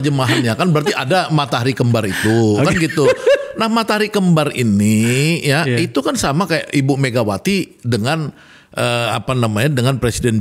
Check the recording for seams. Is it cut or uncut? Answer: uncut